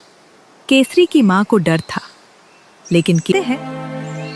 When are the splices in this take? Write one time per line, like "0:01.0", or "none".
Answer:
0:03.3

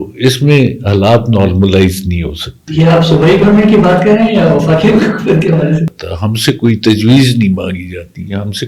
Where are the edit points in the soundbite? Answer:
0:05.9

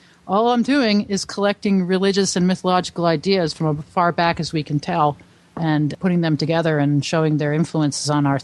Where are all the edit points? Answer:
0:05.9

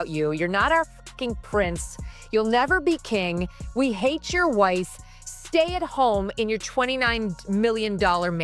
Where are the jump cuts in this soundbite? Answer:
none

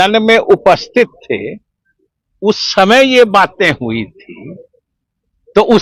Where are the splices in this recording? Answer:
none

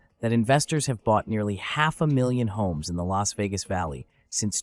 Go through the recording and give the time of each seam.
none

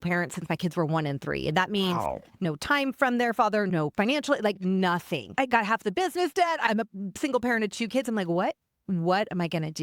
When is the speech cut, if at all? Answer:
0:02.4
0:05.3

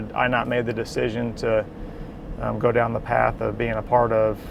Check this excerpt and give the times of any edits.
none

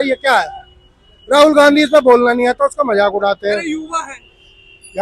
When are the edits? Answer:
none

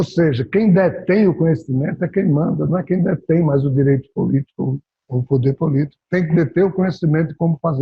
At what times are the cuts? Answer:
none

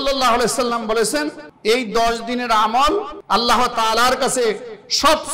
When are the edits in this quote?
0:01.4
0:03.2

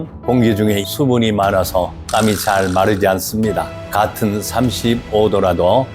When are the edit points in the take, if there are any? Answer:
0:03.8

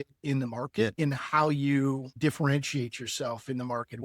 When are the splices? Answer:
0:00.9

